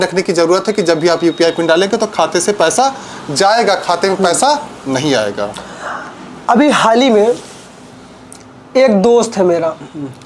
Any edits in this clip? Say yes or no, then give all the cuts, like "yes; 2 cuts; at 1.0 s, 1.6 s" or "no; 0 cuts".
no; 0 cuts